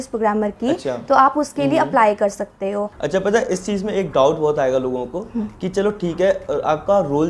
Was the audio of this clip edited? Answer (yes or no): yes